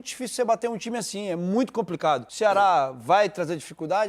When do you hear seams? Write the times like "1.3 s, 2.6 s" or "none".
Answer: 2.3 s